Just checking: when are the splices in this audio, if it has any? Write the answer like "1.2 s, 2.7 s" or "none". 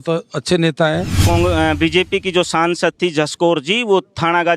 1.2 s